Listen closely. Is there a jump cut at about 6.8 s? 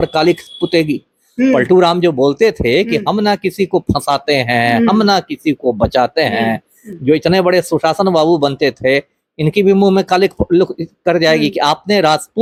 no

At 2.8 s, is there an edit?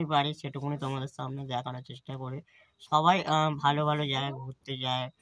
no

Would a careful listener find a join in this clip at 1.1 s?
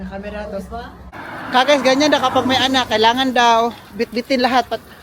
yes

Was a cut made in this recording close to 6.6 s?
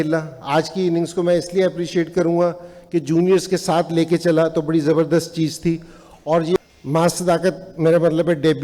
yes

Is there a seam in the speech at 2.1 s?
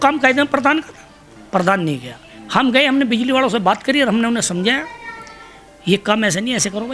no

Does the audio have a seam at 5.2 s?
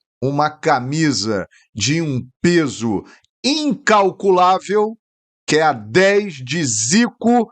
no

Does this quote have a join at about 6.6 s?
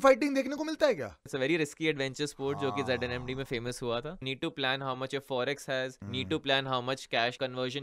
no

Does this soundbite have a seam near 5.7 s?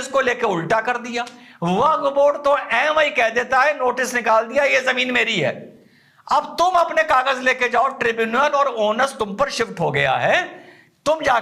no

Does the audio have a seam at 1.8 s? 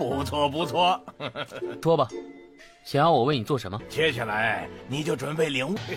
yes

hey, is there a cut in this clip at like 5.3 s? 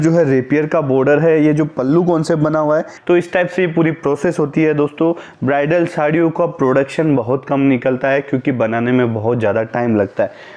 no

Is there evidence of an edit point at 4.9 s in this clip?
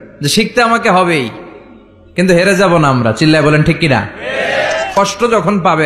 yes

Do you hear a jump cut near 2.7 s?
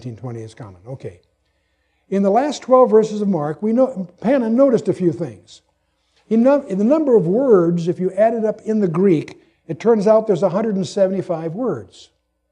no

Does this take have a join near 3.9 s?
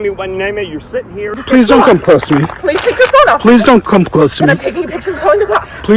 no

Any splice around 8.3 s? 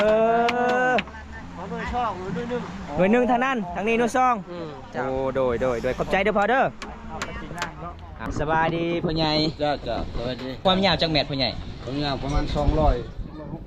yes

